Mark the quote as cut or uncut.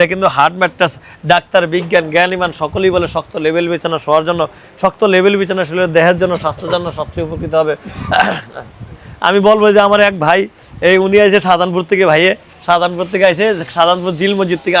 uncut